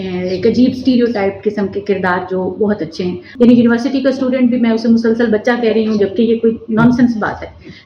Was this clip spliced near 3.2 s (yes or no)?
yes